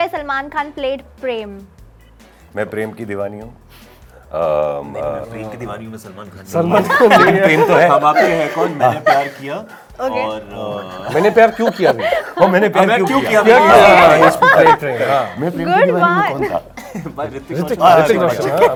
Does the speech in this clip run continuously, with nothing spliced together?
yes; 0 cuts

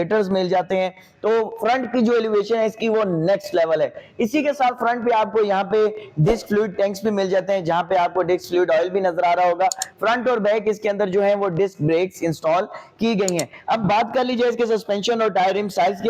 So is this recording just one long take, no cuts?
yes; 0 cuts

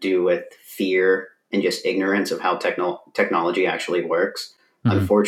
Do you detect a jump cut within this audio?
no; 0 cuts

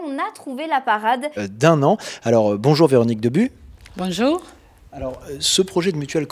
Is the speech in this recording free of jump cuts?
yes; 0 cuts

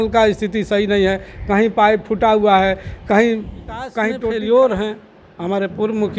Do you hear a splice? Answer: yes; 1 cut; at 4.2 s

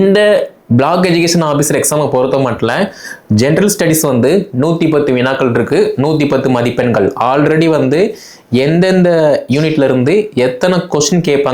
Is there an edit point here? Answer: no; 0 cuts

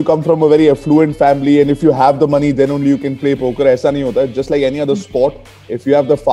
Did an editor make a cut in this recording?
no; 0 cuts

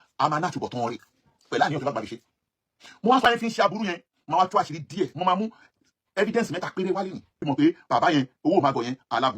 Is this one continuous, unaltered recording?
no; 1 cut; at 3.3 s

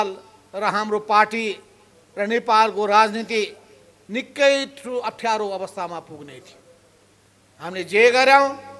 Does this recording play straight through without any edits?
yes; 0 cuts

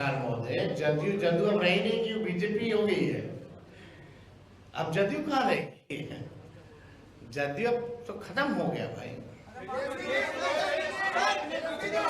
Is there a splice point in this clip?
no; 0 cuts

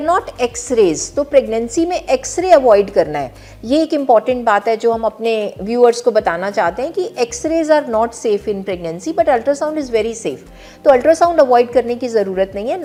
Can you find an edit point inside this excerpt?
no; 0 cuts

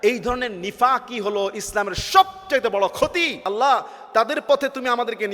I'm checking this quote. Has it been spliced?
yes; 1 cut; at 3.5 s

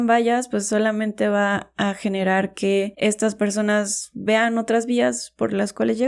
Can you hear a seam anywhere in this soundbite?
no; 0 cuts

